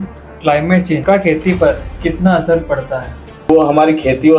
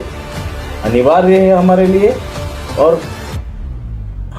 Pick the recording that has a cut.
first; 2 cuts; at 1.0 s, 3.5 s

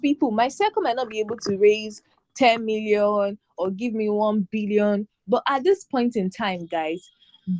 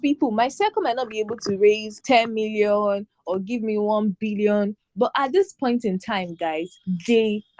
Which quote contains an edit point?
second; 2 cuts; at 1.9 s, 6.7 s

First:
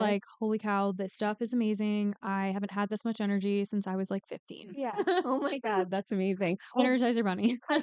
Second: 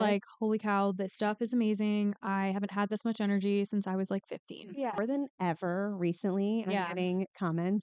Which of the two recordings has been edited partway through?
second; 1 cut; at 5.0 s

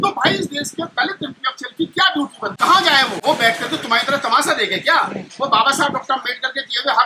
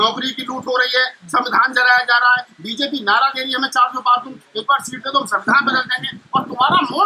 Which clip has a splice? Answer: first; 2 cuts; at 2.5 s, 3.1 s

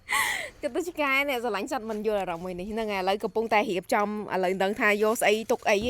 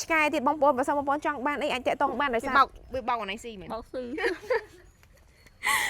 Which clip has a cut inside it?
second; 1 cut; at 2.5 s

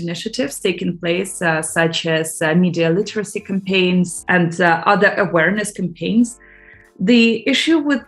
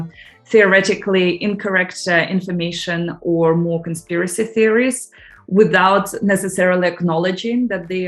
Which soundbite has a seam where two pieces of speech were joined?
first; 2 cuts; at 4.1 s, 6.3 s

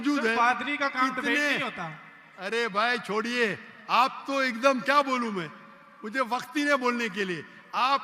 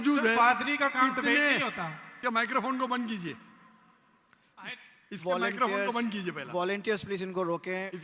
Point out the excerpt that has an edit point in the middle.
second; 1 cut; at 2.0 s

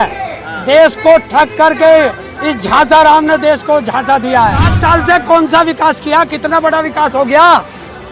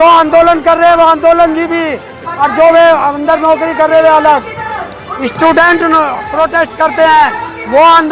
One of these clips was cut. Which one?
first; 1 cut; at 4.7 s

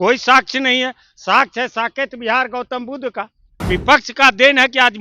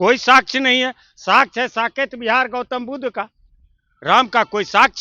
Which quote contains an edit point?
first; 1 cut; at 3.6 s

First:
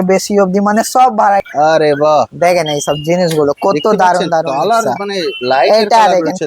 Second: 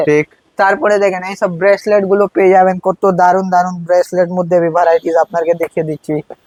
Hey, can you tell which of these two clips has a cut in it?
first; 1 cut; at 1.5 s

